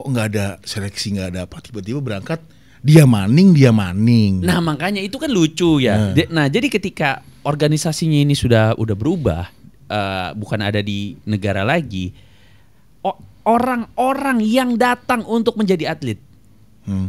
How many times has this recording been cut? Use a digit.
0